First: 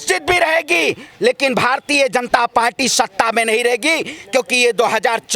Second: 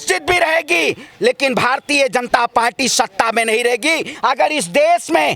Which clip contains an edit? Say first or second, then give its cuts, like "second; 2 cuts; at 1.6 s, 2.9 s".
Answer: second; 1 cut; at 4.1 s